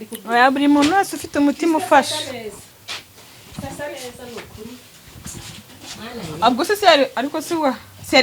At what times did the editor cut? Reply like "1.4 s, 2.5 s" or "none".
none